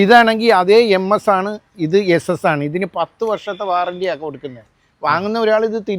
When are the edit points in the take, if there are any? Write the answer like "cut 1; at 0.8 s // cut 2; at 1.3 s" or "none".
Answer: none